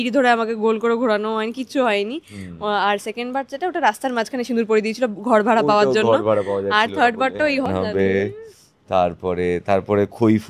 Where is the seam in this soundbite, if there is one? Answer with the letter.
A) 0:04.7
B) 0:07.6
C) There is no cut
B